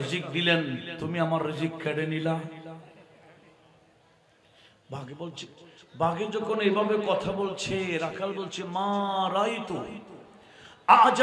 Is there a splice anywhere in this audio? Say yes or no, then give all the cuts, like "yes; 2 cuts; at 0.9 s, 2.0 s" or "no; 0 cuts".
no; 0 cuts